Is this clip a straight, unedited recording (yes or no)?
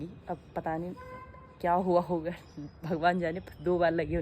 yes